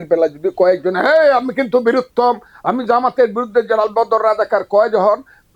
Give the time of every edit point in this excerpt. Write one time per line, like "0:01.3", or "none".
none